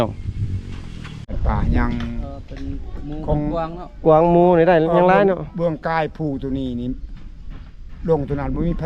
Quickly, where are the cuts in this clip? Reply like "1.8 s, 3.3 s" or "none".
1.2 s